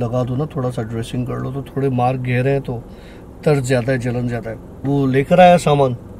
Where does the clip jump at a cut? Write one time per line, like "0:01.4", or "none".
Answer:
0:04.7